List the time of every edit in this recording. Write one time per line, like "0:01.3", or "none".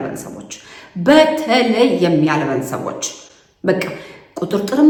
none